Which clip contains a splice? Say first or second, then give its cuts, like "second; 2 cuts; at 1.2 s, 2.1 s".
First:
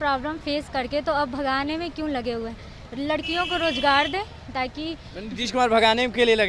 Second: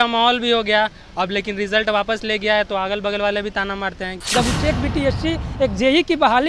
second; 1 cut; at 4.2 s